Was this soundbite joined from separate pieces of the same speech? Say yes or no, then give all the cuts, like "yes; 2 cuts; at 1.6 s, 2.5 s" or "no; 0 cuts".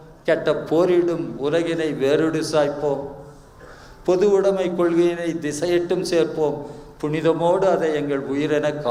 no; 0 cuts